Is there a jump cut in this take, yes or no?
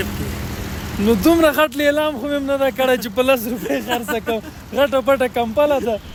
no